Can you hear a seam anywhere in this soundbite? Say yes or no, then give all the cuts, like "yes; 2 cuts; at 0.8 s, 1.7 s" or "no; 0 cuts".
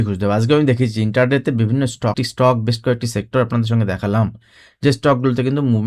yes; 1 cut; at 2.2 s